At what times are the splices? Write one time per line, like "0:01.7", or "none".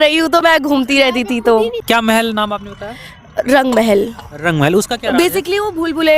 0:01.8